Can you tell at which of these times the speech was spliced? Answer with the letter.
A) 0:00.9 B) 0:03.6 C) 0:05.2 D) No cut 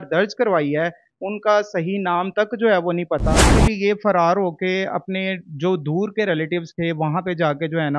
B